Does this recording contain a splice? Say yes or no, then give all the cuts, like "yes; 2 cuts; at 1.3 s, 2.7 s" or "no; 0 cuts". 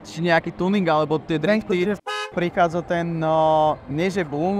yes; 1 cut; at 2.1 s